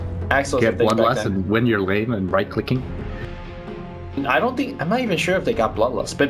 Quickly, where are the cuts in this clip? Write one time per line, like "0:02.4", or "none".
0:03.0